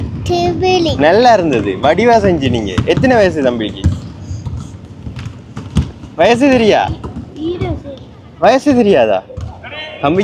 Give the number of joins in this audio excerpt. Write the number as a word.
zero